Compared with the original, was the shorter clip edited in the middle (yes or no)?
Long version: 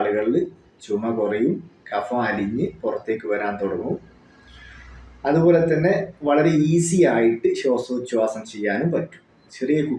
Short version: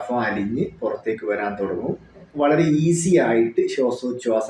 yes